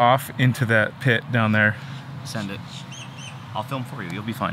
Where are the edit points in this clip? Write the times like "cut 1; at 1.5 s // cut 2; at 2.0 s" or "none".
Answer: none